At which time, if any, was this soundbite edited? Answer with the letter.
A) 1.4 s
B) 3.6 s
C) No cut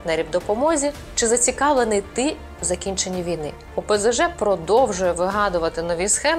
B